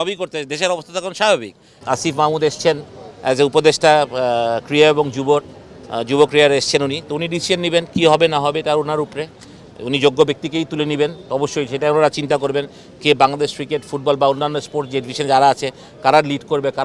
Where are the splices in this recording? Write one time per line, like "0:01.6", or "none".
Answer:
0:01.8